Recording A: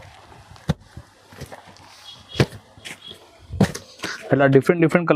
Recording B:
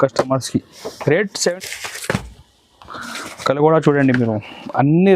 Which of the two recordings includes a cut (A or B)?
B